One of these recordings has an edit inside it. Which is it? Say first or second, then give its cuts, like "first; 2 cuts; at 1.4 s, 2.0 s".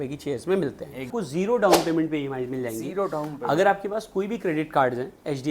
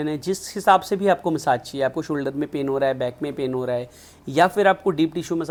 first; 1 cut; at 1.1 s